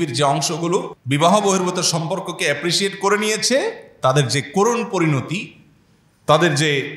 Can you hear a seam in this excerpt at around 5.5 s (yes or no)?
no